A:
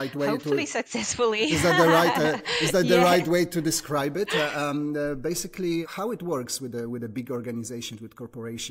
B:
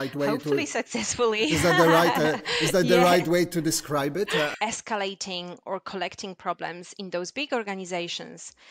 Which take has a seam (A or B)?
B